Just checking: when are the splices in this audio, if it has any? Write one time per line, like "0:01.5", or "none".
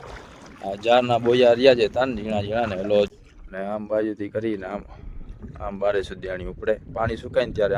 0:03.1